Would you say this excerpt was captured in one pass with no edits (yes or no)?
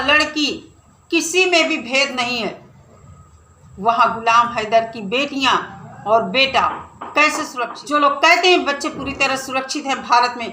no